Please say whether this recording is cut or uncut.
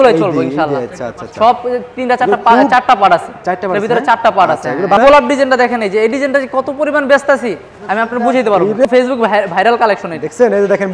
cut